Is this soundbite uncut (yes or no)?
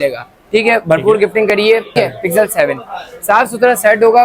no